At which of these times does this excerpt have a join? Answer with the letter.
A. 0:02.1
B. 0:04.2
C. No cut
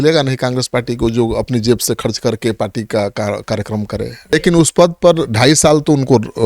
B